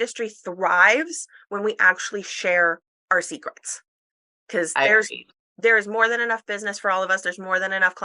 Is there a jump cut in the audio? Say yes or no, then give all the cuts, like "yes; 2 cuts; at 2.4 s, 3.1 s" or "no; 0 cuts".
no; 0 cuts